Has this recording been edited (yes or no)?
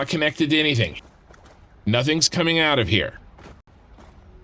yes